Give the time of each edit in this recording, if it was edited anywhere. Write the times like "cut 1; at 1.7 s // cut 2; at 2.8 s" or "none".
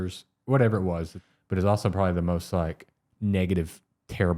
cut 1; at 1.2 s // cut 2; at 3.0 s